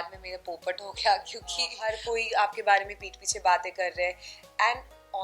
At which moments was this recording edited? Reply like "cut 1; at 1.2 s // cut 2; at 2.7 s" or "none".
cut 1; at 1.8 s

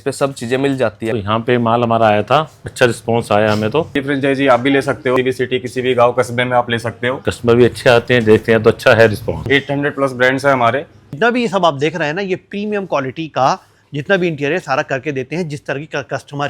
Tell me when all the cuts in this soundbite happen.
cut 1; at 1.1 s // cut 2; at 2.6 s // cut 3; at 3.9 s // cut 4; at 5.2 s // cut 5; at 7.2 s // cut 6; at 9.4 s // cut 7; at 11.1 s

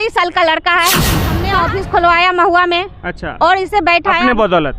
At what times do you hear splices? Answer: cut 1; at 1.5 s

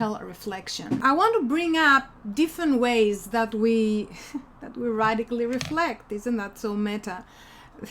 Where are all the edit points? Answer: cut 1; at 1.0 s

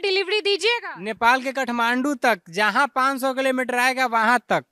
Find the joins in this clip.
none

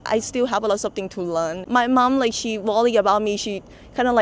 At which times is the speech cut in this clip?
cut 1; at 1.3 s

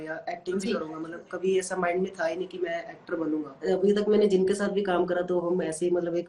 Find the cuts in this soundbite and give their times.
cut 1; at 3.6 s

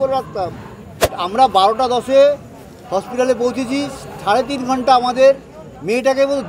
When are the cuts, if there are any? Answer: cut 1; at 1.0 s

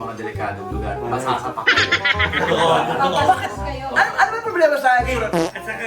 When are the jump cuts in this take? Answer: none

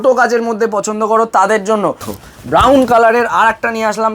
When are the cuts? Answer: cut 1; at 2.1 s

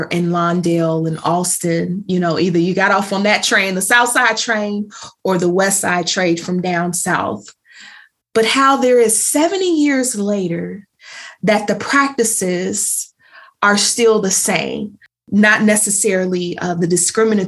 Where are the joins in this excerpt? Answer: cut 1; at 15.2 s

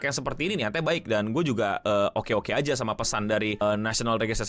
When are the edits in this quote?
none

